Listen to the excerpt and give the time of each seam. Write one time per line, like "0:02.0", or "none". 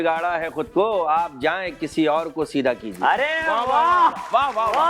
none

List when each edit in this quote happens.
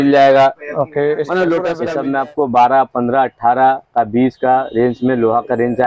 0:01.8

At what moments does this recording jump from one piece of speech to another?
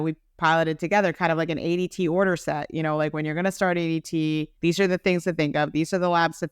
0:04.5

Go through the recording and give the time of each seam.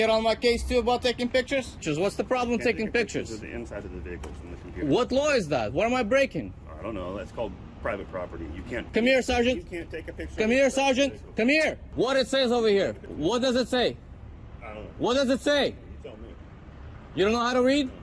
0:01.8
0:08.9
0:11.8
0:13.0

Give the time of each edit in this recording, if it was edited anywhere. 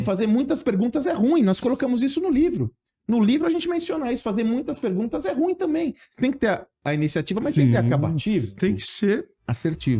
0:08.6

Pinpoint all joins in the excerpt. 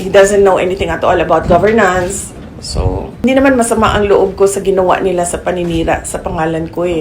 0:03.2

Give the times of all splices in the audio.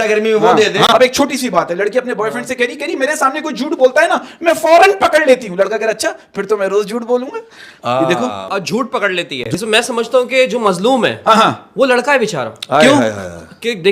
0:00.9
0:09.4

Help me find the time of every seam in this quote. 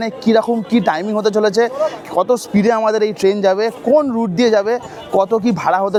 none

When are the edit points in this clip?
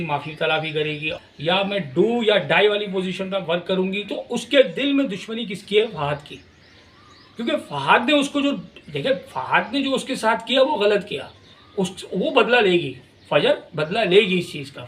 0:01.1
0:04.1

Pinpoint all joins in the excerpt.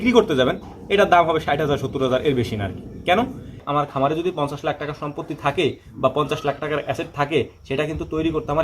0:03.6

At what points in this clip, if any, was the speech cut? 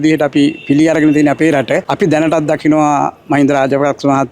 0:01.9

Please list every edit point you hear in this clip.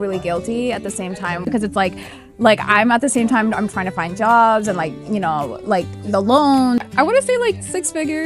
0:01.4
0:06.8

